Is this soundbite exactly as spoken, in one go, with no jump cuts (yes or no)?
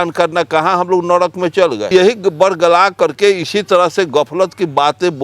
no